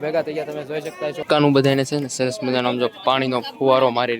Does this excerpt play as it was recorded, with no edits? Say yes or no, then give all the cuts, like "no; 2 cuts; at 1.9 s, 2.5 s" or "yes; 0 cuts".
no; 1 cut; at 1.2 s